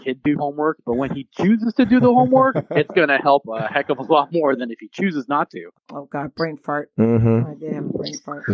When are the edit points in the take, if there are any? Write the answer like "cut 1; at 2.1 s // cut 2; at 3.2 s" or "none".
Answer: cut 1; at 5.6 s